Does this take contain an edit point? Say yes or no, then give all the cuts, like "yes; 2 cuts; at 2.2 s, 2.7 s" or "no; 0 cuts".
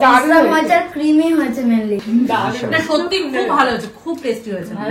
yes; 1 cut; at 2.0 s